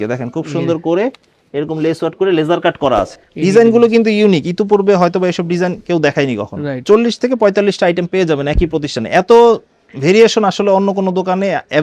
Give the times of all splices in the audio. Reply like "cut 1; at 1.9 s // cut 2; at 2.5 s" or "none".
cut 1; at 3.2 s // cut 2; at 6.8 s